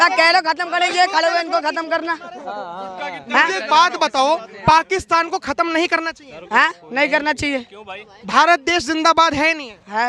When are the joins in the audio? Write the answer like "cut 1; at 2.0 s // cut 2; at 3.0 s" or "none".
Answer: none